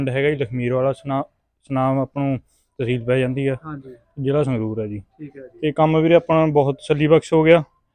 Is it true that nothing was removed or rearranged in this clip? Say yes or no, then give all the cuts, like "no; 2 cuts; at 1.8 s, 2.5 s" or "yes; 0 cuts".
yes; 0 cuts